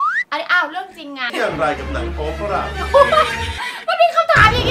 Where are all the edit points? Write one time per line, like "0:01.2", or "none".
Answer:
0:01.3